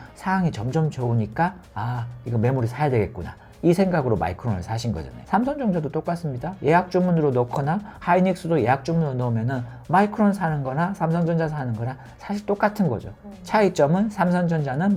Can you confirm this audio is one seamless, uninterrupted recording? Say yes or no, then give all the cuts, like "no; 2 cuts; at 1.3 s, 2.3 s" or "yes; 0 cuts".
yes; 0 cuts